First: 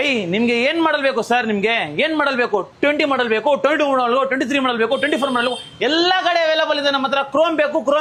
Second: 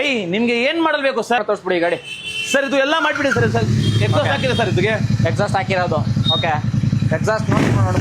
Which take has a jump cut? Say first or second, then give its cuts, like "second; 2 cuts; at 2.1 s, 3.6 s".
second; 1 cut; at 1.4 s